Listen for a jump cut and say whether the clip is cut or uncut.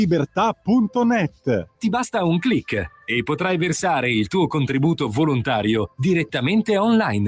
cut